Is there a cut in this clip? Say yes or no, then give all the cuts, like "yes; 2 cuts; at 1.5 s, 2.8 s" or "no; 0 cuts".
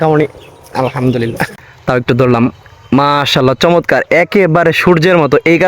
yes; 1 cut; at 1.6 s